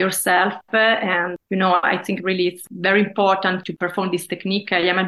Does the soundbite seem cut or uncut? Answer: cut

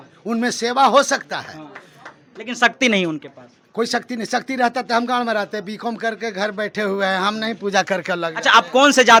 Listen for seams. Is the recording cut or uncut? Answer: uncut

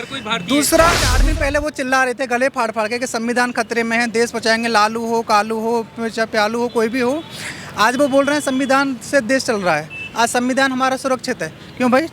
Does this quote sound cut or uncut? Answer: cut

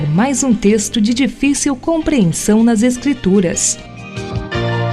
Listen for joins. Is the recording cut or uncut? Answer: cut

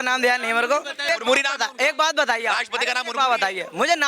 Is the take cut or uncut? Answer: cut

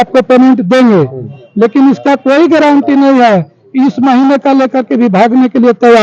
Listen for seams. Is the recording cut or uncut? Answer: uncut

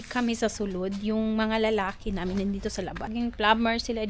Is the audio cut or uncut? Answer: cut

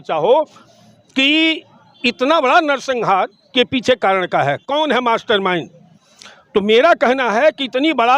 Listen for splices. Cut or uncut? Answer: uncut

